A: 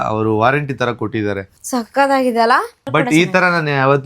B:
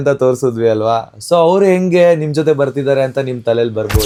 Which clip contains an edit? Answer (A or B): A